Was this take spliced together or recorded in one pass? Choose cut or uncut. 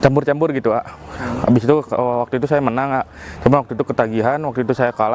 uncut